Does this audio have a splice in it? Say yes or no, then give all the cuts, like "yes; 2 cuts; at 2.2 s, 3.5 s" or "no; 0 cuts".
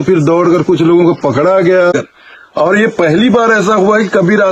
yes; 1 cut; at 1.9 s